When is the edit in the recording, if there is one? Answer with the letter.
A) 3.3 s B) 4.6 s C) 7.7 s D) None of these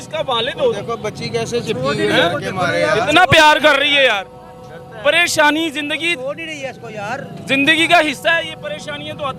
D